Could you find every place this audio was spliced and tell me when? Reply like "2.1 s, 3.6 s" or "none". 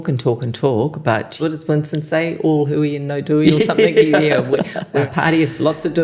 1.4 s, 5.1 s